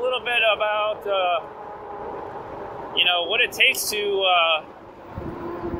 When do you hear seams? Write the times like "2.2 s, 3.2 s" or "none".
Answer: none